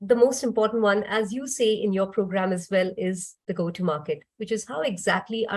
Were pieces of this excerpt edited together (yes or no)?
no